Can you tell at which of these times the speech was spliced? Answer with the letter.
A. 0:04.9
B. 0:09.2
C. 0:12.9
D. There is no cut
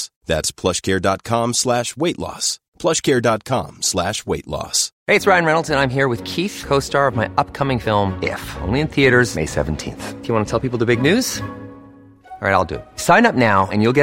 A